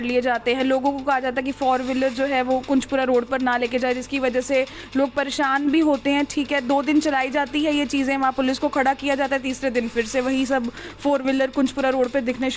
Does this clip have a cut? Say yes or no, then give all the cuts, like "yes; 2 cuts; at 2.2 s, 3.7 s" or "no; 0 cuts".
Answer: no; 0 cuts